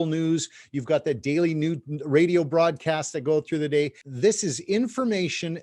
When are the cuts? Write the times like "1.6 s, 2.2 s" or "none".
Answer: 4.0 s